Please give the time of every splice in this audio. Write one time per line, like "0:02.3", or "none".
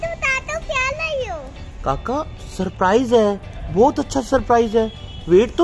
none